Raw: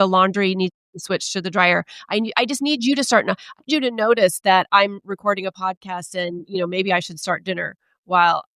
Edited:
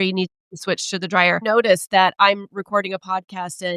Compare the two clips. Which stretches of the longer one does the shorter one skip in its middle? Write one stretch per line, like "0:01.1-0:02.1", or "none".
0:01.8-0:03.9